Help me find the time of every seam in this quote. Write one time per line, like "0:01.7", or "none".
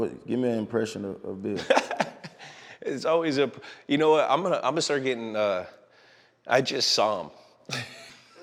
none